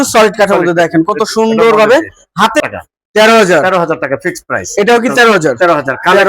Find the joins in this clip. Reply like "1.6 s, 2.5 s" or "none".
2.7 s